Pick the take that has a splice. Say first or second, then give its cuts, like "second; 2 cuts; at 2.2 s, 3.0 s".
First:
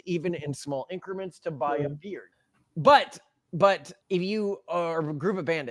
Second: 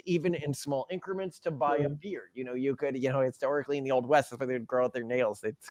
first; 1 cut; at 2.5 s